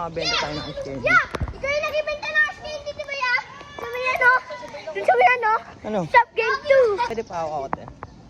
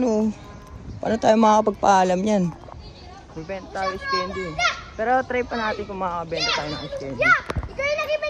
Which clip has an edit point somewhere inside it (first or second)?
first